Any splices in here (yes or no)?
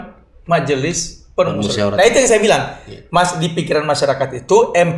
no